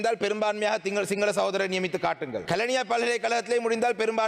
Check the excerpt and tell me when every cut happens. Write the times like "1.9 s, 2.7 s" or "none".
2.4 s